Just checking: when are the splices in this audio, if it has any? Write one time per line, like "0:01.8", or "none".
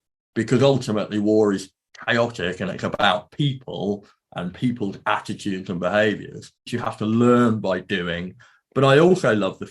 0:06.7